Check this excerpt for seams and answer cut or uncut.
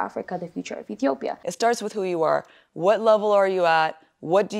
cut